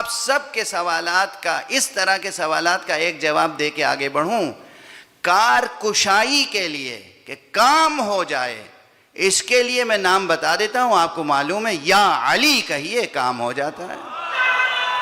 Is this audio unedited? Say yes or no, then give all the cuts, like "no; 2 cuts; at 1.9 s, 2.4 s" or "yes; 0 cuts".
yes; 0 cuts